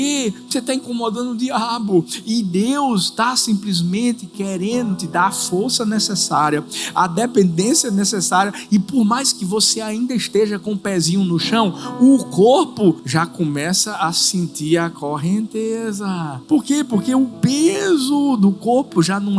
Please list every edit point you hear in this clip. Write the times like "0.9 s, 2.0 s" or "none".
13.0 s, 16.3 s